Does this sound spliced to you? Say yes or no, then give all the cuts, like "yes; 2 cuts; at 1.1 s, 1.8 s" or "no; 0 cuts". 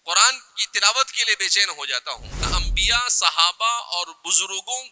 yes; 1 cut; at 2.5 s